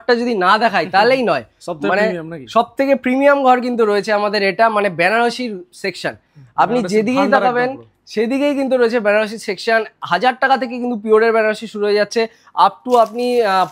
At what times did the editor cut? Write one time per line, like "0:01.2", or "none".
none